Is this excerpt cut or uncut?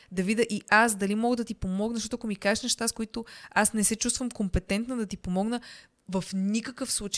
uncut